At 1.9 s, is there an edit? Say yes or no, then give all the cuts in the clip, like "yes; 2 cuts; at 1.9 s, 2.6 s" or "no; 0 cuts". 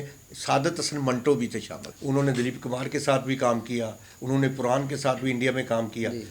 yes; 1 cut; at 1.9 s